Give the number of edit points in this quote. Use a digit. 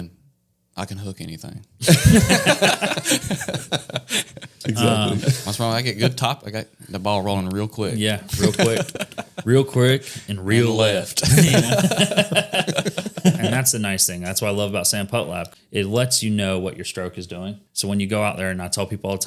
4